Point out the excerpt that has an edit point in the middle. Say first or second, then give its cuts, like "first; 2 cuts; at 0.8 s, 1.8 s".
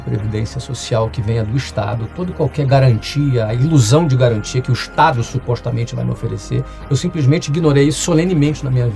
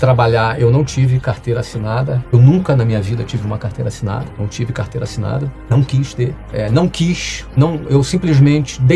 second; 5 cuts; at 2.2 s, 4.3 s, 5.7 s, 6.4 s, 7.4 s